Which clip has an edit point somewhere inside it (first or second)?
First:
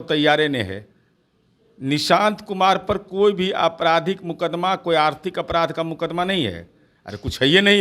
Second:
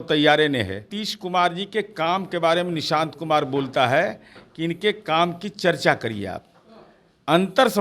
second